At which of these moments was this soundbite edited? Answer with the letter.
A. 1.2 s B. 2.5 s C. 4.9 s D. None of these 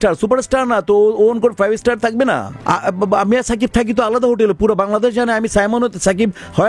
B